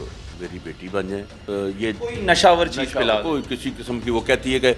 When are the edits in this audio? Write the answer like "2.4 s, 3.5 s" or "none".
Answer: 1.4 s

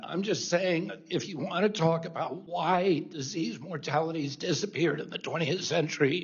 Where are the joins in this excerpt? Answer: 2.4 s

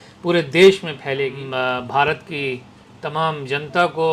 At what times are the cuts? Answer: 1.4 s

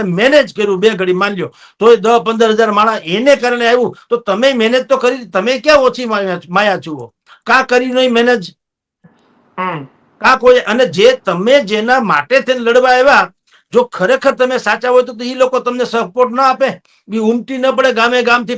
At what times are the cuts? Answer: none

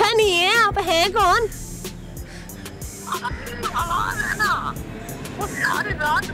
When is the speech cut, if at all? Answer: none

